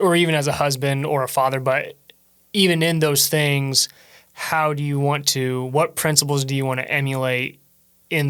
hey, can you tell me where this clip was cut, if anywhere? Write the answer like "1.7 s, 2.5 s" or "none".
none